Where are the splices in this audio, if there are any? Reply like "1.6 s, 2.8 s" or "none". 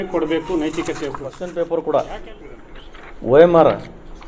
1.4 s